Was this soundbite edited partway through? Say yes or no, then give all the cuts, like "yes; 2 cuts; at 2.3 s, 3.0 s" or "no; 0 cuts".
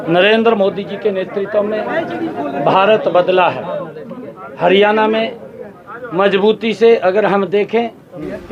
no; 0 cuts